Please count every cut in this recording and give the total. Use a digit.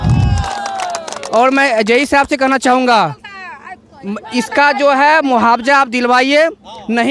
0